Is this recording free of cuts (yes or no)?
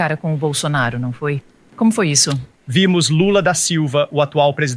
no